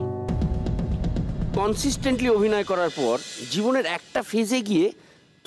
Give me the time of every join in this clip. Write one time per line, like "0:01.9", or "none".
0:01.5